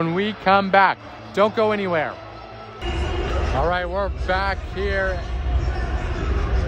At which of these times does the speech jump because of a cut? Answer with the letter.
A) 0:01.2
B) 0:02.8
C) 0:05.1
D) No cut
B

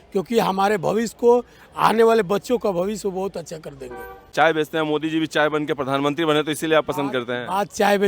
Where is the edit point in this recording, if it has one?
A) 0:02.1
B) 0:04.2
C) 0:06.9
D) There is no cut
B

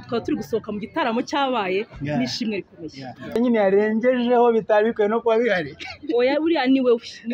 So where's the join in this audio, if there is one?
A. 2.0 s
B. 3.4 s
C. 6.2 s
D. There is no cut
B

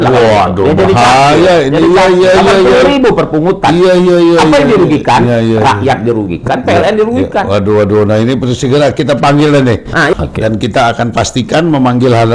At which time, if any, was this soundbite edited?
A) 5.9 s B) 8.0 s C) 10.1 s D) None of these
C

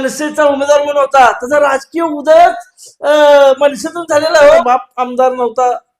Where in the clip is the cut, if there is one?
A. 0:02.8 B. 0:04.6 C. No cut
B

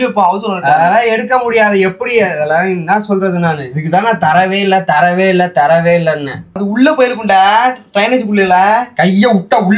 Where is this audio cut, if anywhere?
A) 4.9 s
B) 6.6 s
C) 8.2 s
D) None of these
B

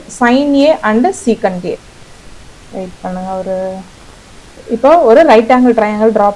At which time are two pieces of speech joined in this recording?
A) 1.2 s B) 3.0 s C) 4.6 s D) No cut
C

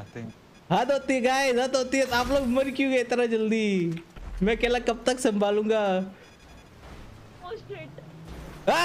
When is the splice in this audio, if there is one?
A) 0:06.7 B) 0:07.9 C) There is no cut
A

